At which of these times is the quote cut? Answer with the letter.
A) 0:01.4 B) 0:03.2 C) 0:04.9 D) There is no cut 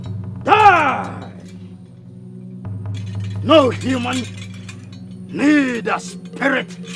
B